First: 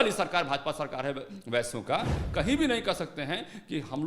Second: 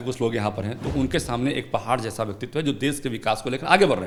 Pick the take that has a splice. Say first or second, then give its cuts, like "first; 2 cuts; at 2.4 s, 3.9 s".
first; 1 cut; at 2.2 s